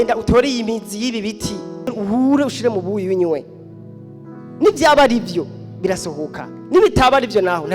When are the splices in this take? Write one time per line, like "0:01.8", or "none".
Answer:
0:01.9